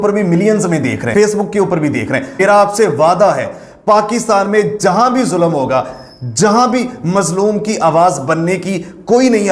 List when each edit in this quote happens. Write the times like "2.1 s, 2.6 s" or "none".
2.3 s